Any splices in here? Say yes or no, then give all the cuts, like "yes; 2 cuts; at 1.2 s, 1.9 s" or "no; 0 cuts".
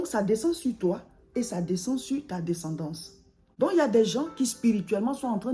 yes; 1 cut; at 3.2 s